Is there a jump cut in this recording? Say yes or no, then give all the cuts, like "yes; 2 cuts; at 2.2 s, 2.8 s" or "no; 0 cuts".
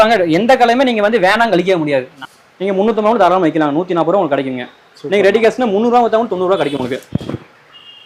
yes; 2 cuts; at 2.1 s, 7.0 s